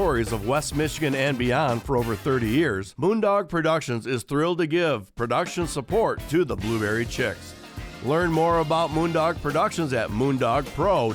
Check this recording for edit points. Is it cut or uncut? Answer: cut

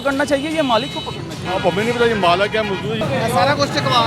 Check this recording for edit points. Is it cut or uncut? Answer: cut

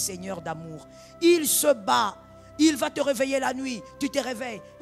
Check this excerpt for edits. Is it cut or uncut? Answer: uncut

